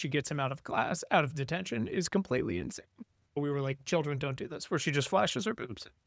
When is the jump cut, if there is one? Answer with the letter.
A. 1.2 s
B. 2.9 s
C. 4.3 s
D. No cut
D